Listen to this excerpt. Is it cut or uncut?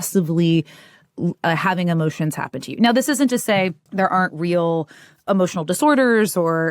cut